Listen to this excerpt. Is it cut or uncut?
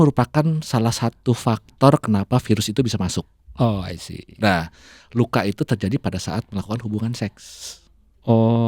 uncut